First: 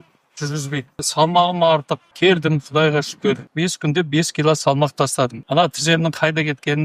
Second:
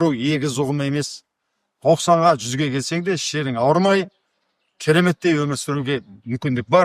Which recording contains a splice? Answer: first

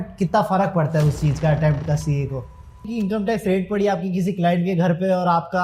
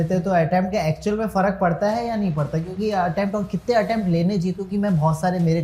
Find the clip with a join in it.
first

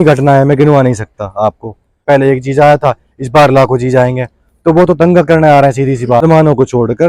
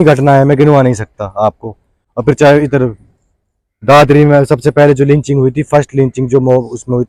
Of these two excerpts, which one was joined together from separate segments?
first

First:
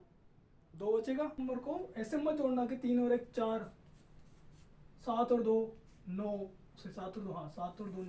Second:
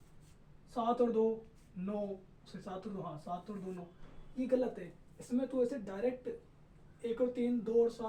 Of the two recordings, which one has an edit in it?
first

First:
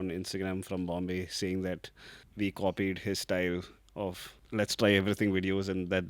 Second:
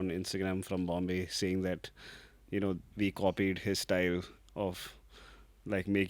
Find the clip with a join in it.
first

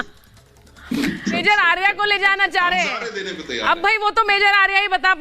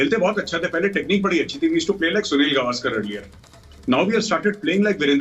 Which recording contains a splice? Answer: first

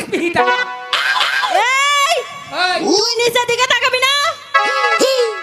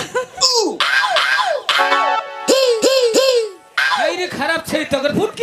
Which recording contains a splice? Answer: second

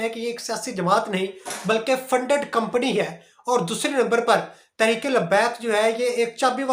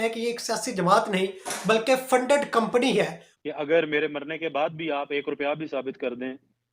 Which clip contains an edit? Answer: second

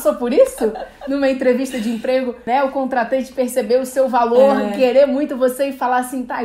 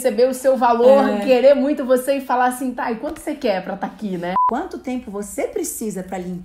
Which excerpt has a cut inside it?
second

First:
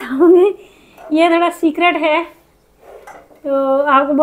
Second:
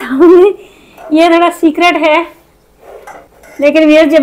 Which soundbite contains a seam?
second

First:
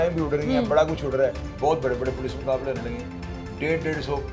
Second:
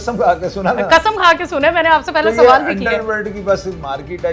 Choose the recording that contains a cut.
first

